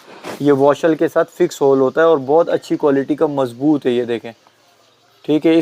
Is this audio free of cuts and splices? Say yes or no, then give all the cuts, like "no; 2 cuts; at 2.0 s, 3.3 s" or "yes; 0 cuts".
yes; 0 cuts